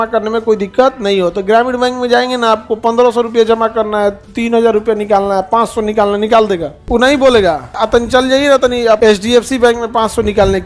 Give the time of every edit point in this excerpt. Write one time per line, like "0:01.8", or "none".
0:06.7
0:07.7
0:09.0